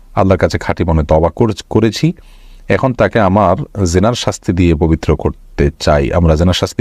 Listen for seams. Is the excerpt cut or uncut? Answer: uncut